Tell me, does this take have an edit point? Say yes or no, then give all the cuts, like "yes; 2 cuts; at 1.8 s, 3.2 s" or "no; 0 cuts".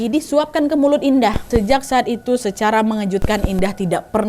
yes; 1 cut; at 1.5 s